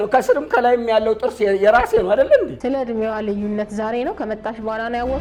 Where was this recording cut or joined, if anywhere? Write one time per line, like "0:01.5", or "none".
none